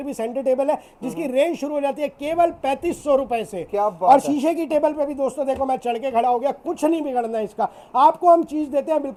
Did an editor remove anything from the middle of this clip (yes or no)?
no